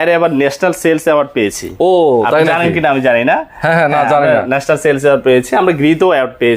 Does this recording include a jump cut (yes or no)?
no